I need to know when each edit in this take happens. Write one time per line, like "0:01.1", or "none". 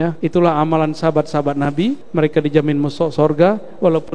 0:02.0